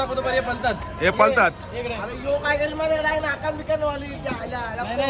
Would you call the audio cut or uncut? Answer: uncut